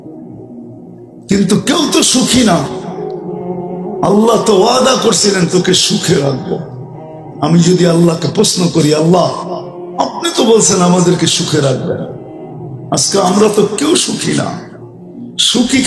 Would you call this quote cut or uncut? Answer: uncut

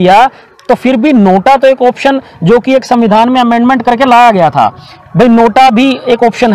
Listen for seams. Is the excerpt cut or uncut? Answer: uncut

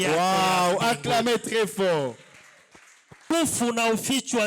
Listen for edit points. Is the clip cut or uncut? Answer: cut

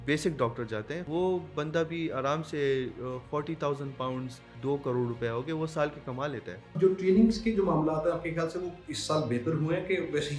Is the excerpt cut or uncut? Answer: cut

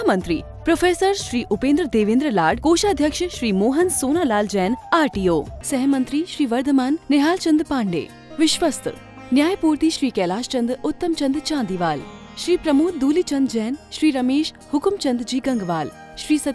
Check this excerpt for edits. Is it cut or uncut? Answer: uncut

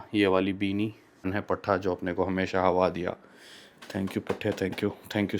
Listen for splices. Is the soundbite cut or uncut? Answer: cut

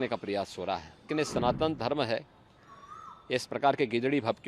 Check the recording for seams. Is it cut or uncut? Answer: cut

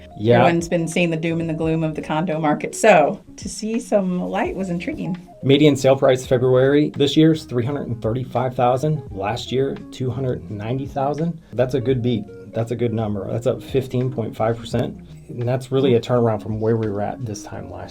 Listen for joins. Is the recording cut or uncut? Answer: cut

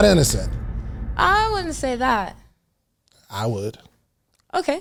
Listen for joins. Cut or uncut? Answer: uncut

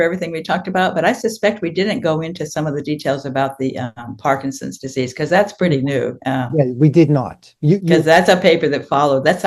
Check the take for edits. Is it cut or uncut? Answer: uncut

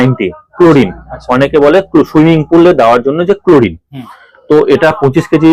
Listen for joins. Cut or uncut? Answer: uncut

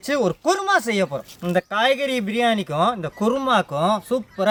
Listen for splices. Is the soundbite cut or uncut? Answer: uncut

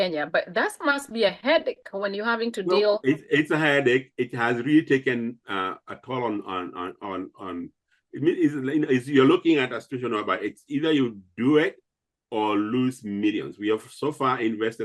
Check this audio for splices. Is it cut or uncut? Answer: uncut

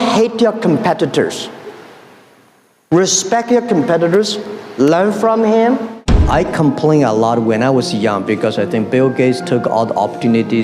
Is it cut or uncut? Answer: cut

